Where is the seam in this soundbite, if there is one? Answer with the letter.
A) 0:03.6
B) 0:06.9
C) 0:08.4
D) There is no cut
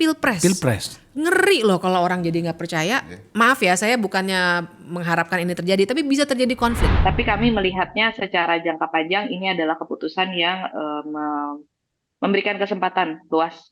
B